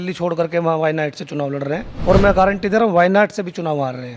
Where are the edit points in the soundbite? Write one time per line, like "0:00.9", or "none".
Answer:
0:01.9